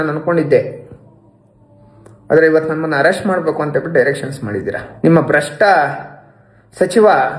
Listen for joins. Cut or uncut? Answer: cut